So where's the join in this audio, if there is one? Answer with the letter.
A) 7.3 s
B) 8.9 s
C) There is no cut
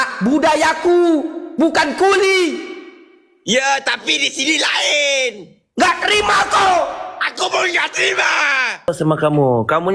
B